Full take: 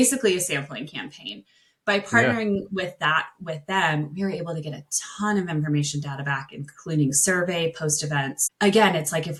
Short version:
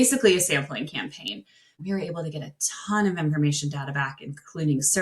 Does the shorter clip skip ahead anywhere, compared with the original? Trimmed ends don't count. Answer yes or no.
yes